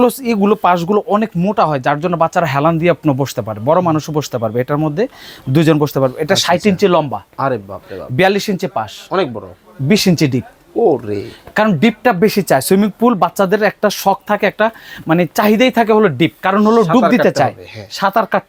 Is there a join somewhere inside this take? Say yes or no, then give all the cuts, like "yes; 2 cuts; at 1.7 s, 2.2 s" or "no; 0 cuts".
no; 0 cuts